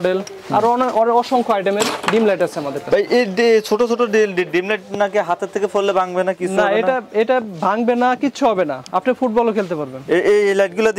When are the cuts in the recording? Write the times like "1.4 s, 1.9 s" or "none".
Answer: none